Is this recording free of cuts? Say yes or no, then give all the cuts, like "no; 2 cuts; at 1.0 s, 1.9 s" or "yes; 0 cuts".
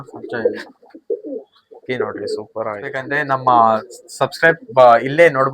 no; 1 cut; at 3.1 s